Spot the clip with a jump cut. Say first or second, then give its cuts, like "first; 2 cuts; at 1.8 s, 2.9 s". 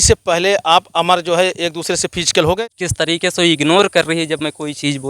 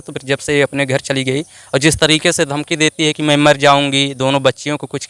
first; 1 cut; at 2.6 s